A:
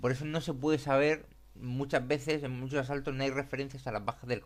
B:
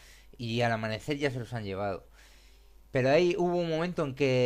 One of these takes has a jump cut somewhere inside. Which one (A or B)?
A